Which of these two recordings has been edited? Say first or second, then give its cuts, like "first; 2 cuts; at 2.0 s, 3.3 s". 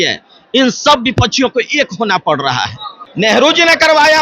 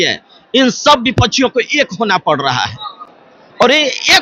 first; 1 cut; at 3.3 s